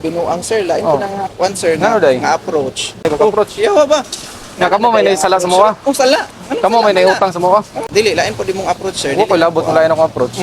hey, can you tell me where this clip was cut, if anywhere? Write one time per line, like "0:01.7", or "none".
0:03.0
0:07.8